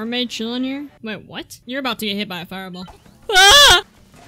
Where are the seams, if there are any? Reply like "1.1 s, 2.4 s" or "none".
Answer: 1.6 s, 2.9 s